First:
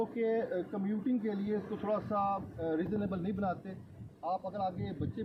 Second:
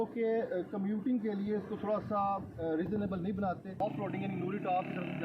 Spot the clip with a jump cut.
second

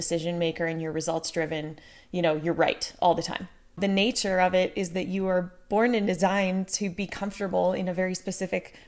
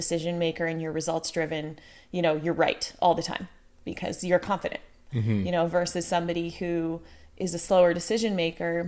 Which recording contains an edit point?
first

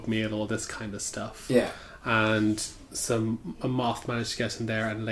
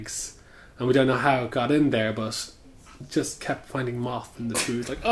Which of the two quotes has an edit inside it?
second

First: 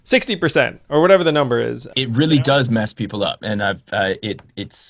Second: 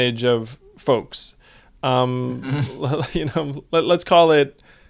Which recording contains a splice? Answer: first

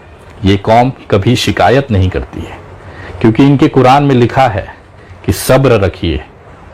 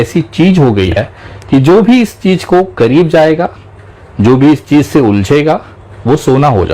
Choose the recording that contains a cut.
second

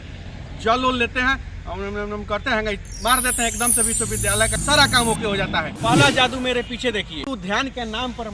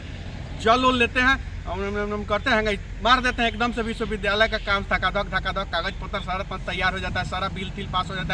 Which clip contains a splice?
first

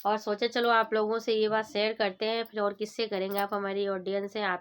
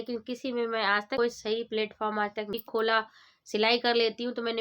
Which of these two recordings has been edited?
second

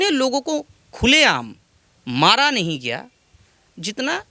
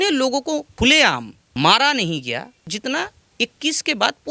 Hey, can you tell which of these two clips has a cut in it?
second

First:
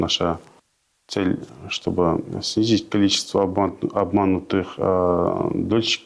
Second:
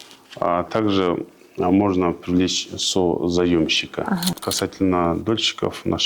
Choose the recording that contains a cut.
second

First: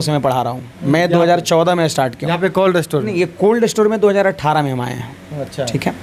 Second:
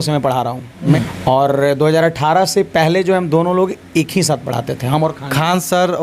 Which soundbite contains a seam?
second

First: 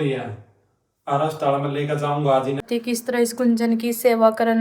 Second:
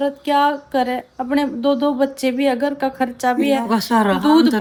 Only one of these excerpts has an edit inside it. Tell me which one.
first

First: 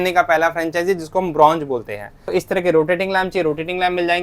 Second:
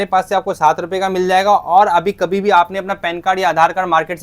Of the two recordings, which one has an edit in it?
first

